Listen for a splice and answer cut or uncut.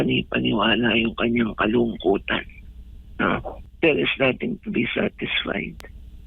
cut